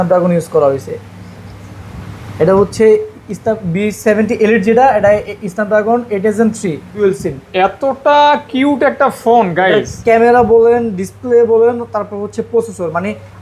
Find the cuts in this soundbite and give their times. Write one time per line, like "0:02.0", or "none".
0:07.0